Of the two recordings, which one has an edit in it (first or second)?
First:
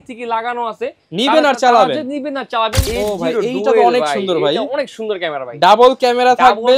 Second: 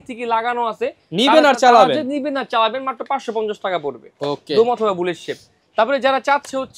first